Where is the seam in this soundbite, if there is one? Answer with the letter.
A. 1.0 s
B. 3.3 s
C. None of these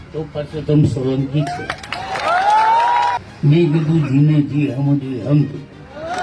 B